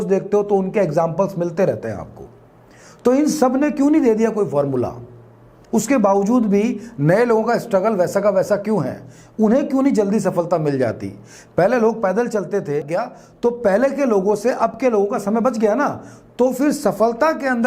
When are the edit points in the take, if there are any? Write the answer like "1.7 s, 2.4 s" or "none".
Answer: 12.9 s